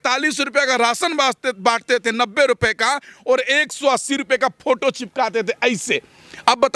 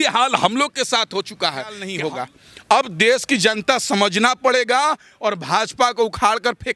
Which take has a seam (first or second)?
second